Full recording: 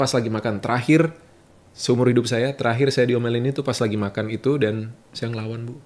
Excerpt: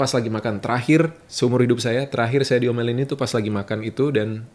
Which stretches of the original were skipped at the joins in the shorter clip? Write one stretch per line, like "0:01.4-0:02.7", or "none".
0:01.2-0:01.7

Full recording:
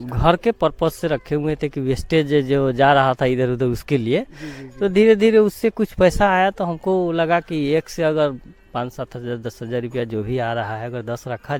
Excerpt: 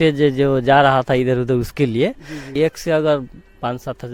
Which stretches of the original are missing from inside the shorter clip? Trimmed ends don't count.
0:04.6-0:07.6

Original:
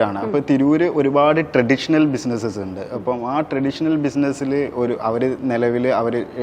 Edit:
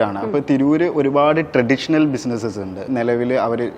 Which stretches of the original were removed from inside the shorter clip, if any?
0:02.9-0:05.4

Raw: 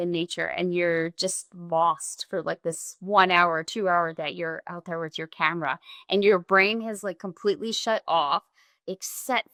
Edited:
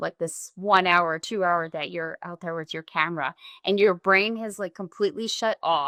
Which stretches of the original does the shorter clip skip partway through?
none

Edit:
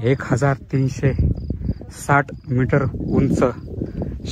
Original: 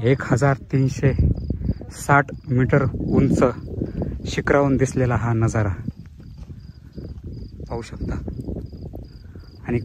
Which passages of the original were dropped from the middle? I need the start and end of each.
none

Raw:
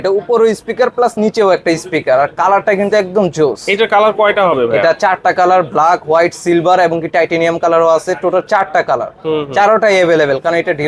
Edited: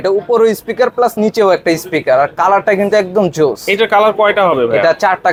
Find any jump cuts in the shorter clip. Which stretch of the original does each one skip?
none

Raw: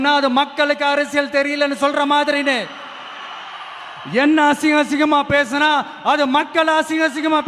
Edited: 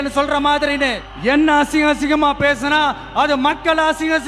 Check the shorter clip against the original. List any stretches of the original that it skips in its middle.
0:02.7-0:04.0

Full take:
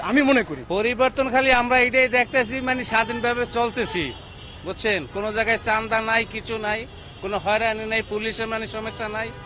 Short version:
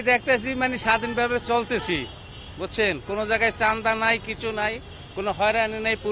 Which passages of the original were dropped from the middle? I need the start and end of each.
none

